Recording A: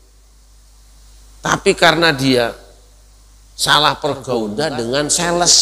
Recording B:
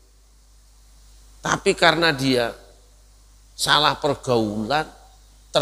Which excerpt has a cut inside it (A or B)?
A